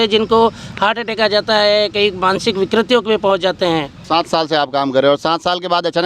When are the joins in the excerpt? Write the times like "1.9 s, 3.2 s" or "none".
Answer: 4.0 s